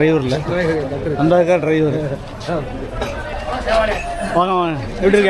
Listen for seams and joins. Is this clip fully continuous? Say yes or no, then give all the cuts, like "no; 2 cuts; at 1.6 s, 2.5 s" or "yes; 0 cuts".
no; 1 cut; at 3.3 s